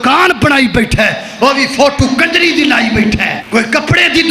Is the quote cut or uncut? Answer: cut